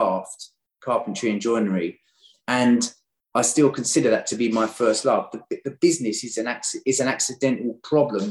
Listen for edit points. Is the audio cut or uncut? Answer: uncut